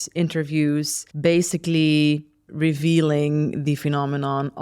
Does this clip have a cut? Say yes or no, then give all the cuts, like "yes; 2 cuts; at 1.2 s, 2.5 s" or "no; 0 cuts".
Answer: yes; 2 cuts; at 1.0 s, 2.4 s